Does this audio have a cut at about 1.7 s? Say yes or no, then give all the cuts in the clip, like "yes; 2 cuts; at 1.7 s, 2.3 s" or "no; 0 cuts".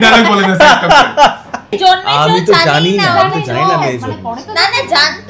yes; 1 cut; at 1.7 s